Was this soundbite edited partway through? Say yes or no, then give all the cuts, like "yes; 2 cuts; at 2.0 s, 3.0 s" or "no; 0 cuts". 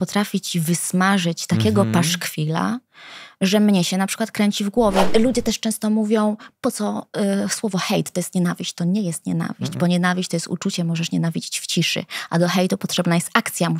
yes; 1 cut; at 5.1 s